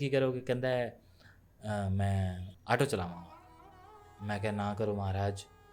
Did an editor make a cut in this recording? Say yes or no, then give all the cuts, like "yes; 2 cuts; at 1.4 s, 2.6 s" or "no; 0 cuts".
yes; 1 cut; at 2.4 s